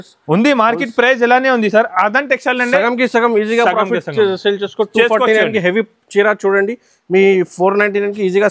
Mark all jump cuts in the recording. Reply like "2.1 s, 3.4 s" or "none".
none